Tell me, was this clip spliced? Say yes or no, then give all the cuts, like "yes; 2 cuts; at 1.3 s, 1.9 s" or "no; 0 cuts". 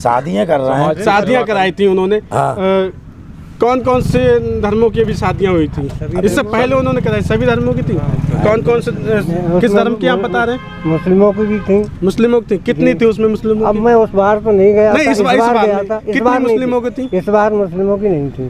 no; 0 cuts